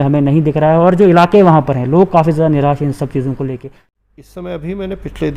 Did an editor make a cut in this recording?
yes; 1 cut; at 3.6 s

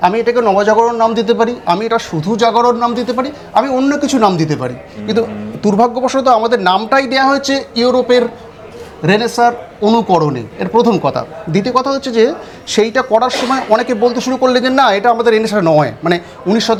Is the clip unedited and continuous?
yes; 0 cuts

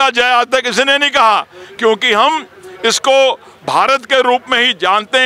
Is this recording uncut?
yes; 0 cuts

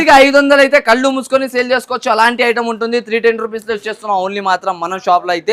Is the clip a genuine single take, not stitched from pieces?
yes; 0 cuts

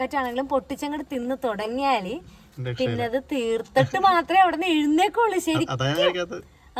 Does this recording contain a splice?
no; 0 cuts

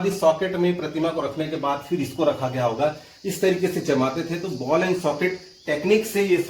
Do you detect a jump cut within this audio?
no; 0 cuts

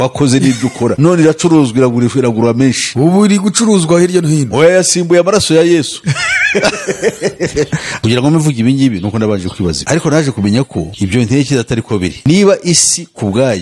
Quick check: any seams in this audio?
yes; 1 cut; at 7.9 s

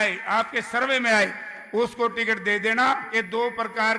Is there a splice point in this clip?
yes; 1 cut; at 3.1 s

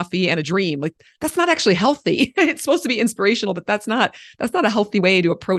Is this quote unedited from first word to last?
yes; 0 cuts

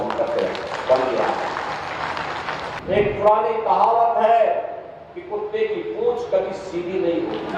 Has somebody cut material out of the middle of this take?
yes; 1 cut; at 2.7 s

